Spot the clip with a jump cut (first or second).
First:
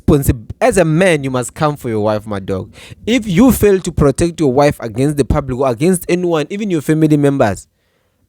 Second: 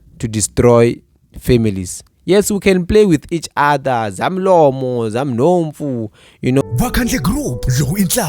second